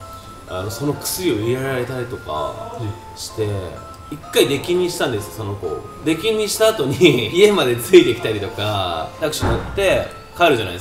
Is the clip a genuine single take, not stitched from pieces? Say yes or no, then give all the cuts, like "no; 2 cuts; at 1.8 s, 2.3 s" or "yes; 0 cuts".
no; 2 cuts; at 7.3 s, 9.1 s